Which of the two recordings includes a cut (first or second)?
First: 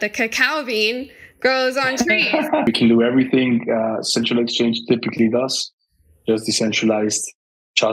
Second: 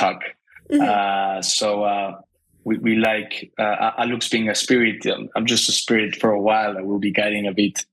first